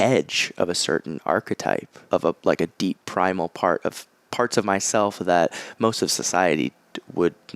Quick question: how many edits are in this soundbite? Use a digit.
1